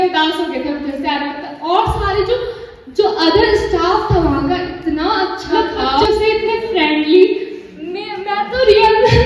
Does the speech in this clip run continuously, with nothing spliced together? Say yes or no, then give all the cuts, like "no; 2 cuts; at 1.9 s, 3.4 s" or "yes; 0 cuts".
no; 1 cut; at 6.0 s